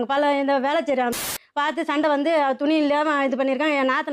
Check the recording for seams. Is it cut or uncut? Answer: cut